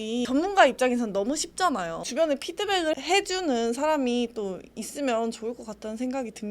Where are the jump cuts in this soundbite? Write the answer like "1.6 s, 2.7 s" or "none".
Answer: 2.0 s